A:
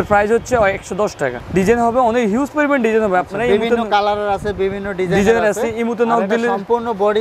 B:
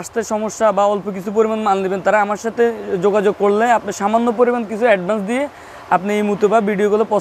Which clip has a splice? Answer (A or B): A